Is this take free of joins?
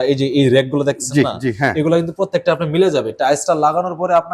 yes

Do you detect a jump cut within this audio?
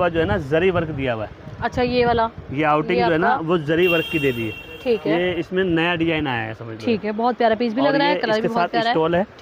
no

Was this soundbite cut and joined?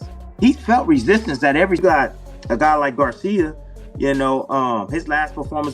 yes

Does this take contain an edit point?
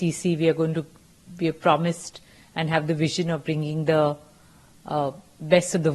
no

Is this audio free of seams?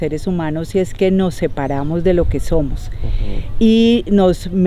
yes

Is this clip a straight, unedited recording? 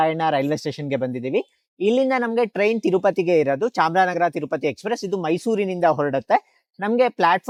yes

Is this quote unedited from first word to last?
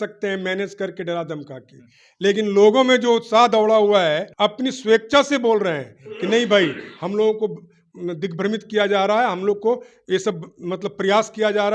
no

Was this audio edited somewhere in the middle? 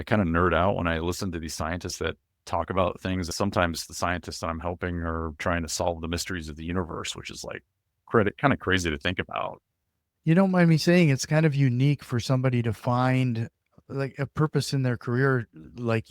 yes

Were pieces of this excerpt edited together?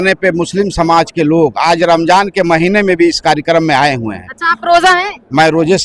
no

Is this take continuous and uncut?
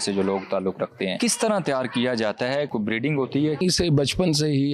no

